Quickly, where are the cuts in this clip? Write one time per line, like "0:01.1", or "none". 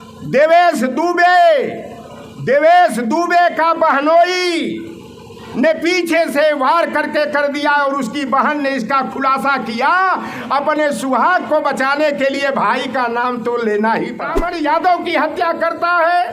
0:14.4